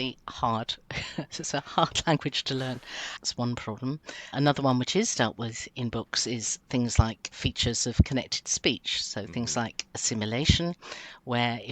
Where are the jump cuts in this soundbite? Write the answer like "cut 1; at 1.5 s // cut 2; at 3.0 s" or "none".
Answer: cut 1; at 3.1 s // cut 2; at 4.3 s // cut 3; at 7.2 s